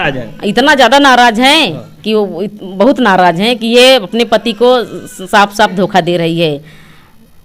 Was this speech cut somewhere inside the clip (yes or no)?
no